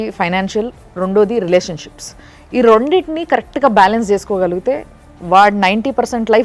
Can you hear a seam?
no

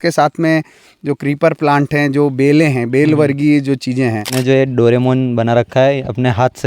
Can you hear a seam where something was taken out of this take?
yes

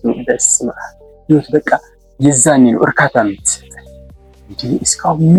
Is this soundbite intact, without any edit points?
yes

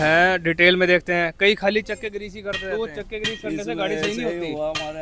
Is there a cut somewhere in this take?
no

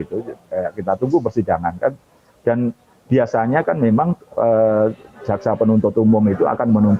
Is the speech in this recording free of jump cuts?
yes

